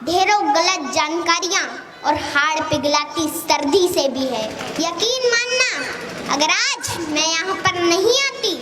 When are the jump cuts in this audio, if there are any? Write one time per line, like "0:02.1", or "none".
0:04.6